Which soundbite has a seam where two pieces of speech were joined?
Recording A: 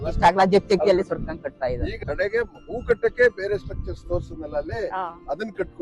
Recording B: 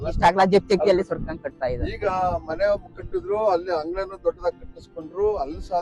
A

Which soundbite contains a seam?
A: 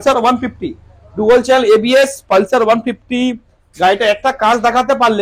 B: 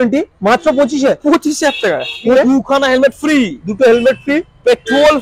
B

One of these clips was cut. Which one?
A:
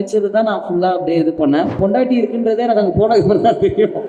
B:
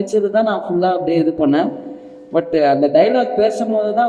A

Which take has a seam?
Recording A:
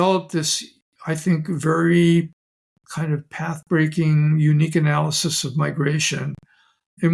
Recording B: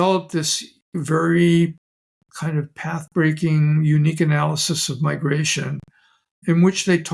B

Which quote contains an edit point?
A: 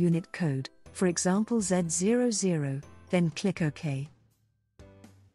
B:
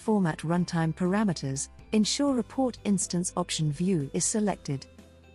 A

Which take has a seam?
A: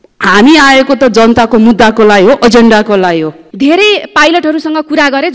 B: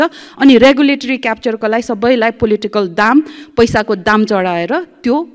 A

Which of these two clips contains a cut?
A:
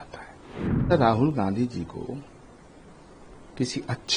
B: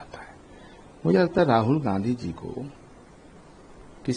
A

